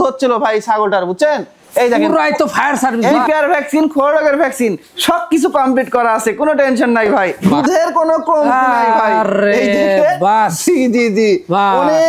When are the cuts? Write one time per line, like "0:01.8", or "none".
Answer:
0:03.2
0:07.4